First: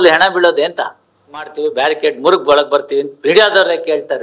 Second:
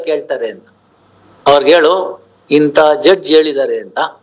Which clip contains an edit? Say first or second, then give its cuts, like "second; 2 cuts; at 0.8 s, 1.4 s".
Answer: first; 1 cut; at 1.6 s